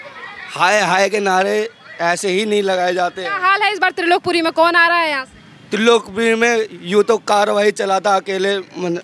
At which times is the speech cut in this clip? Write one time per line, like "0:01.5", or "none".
none